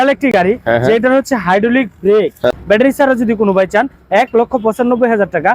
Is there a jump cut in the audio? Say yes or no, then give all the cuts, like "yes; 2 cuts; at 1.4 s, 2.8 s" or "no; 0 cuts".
yes; 1 cut; at 2.5 s